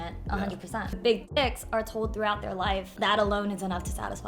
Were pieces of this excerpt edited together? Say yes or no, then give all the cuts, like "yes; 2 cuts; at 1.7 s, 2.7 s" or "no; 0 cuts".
yes; 2 cuts; at 1.0 s, 2.9 s